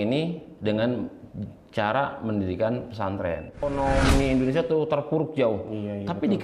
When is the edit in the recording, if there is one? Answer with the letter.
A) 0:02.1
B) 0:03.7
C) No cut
B